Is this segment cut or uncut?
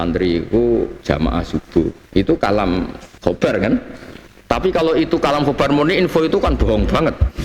cut